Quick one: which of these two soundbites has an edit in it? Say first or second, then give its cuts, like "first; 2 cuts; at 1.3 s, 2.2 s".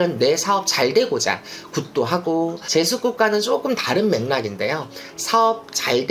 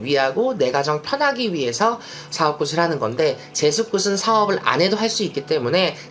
first; 1 cut; at 2.6 s